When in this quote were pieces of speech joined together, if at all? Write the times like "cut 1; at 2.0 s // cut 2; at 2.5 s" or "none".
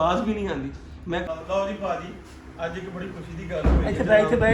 cut 1; at 1.2 s